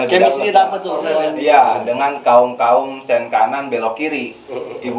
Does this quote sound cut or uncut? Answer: cut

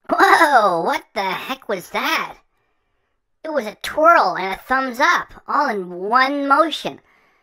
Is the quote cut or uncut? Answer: uncut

